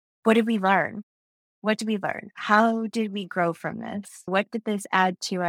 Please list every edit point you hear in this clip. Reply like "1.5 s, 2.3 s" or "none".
4.3 s